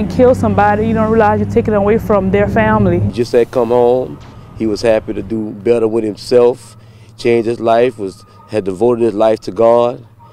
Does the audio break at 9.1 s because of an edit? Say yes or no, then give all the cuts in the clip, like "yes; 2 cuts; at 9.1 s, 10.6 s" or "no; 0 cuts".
no; 1 cut; at 3.1 s